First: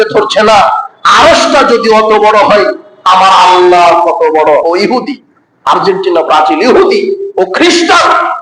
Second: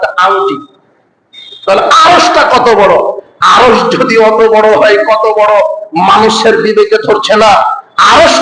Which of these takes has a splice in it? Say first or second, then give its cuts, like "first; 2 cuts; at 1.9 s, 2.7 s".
first; 1 cut; at 4.6 s